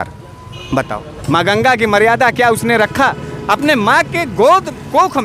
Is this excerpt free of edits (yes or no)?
no